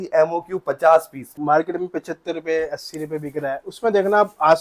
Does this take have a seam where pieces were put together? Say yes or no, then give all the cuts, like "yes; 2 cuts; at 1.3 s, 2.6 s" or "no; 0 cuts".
yes; 1 cut; at 1.4 s